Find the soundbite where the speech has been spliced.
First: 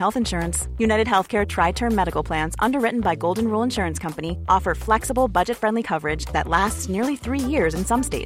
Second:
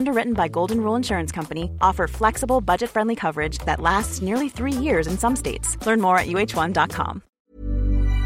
second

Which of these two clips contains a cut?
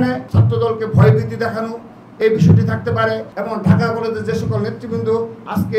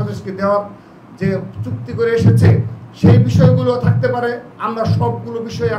first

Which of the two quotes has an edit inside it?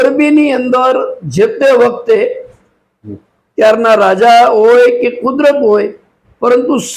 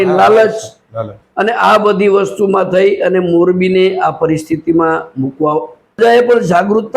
second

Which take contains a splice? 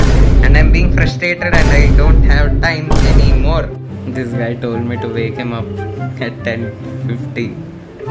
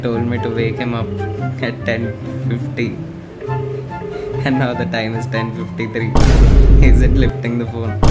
first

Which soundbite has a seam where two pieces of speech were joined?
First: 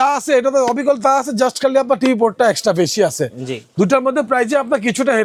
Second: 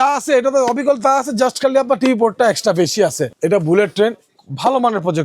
second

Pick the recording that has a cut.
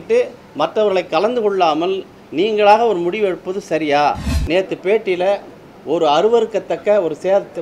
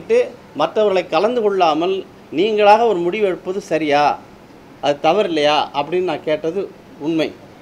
first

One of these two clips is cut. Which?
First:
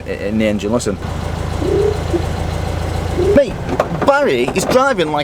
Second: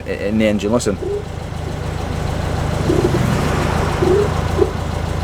first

